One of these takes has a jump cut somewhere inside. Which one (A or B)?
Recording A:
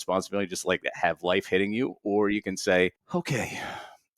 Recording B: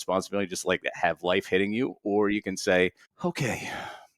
A